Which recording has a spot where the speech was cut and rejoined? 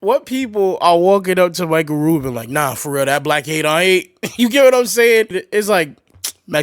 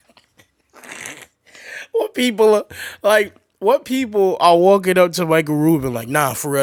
first; 1 cut; at 5.4 s

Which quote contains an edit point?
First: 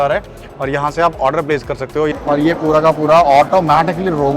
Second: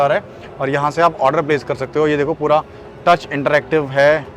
first; 1 cut; at 2.1 s

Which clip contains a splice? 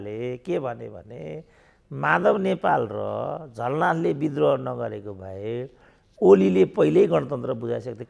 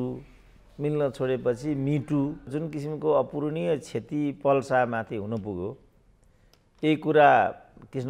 second; 1 cut; at 2.5 s

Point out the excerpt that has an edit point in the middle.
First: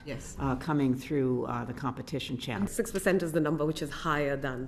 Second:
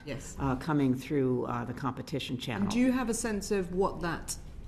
first; 1 cut; at 2.7 s

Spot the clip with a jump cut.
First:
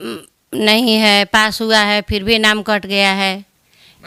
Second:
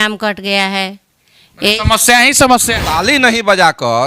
second; 1 cut; at 3.1 s

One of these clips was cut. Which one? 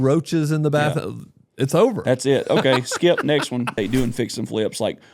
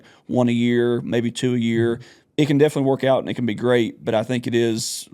first; 1 cut; at 3.7 s

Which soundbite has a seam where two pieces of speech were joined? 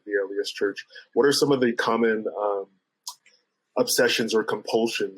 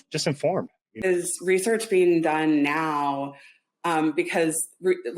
second; 1 cut; at 1.3 s

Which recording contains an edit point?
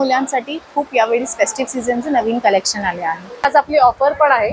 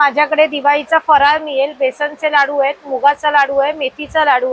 first; 1 cut; at 3.4 s

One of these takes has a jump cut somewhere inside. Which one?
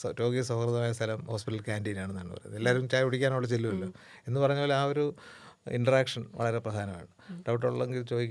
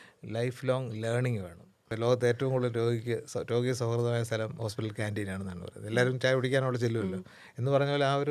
second; 1 cut; at 1.9 s

